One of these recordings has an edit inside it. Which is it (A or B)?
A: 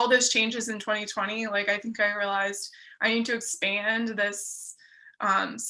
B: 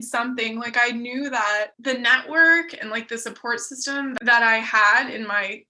B